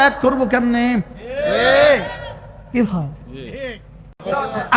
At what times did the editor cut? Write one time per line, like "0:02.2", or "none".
none